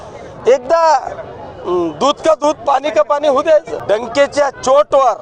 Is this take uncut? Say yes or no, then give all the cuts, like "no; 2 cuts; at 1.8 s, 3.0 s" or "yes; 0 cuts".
no; 1 cut; at 3.7 s